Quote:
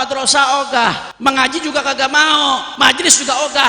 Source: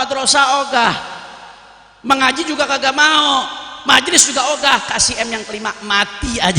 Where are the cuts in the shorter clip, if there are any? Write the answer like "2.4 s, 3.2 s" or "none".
1.1 s, 2.7 s